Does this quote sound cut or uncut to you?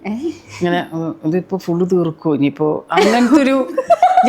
uncut